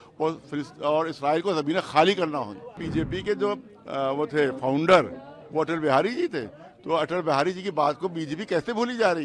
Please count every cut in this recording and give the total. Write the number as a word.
one